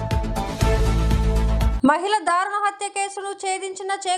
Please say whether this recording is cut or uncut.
cut